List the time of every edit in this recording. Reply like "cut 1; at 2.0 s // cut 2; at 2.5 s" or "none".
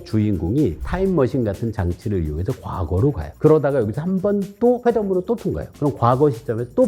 cut 1; at 3.3 s // cut 2; at 4.8 s